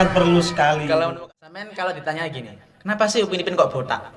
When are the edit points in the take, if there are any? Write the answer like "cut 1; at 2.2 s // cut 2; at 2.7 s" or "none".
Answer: cut 1; at 1.1 s